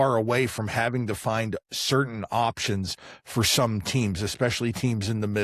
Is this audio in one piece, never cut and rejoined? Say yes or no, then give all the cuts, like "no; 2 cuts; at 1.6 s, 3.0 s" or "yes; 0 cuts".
yes; 0 cuts